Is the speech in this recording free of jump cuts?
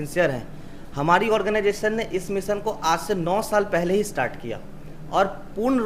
yes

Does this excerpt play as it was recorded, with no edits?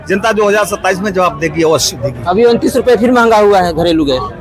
yes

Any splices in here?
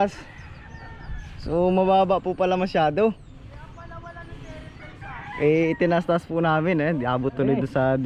no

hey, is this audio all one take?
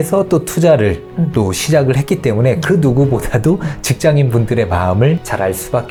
yes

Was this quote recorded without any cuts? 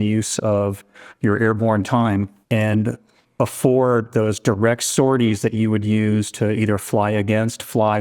no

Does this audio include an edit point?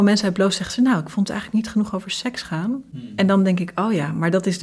yes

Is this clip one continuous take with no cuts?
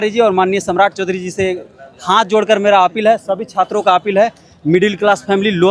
yes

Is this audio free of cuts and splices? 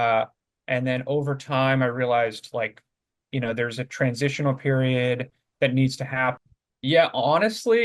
no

